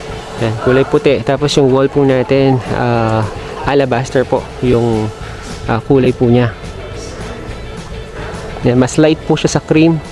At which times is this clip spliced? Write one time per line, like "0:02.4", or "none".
none